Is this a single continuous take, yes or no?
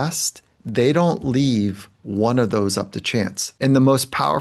no